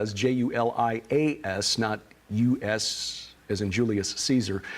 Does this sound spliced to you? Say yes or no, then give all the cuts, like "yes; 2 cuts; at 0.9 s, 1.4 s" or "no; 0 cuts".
yes; 1 cut; at 3.7 s